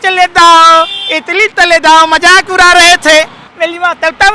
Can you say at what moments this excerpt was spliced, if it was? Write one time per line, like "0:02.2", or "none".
0:03.4